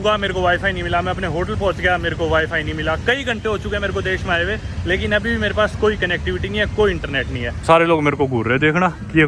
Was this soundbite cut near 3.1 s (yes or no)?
no